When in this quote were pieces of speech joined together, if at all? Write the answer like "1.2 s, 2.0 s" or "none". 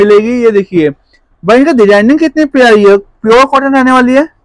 none